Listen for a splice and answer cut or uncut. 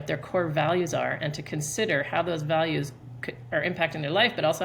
uncut